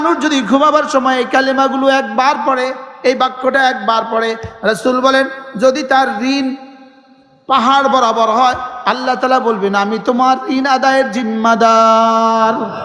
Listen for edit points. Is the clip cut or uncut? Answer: uncut